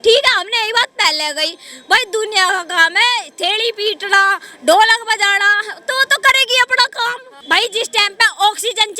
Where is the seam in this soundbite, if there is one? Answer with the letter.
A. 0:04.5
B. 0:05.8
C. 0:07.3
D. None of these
C